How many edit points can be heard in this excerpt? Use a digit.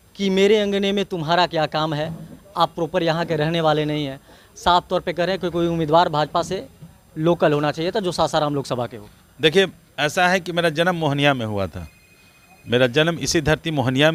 0